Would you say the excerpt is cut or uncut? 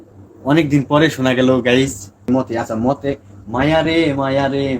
cut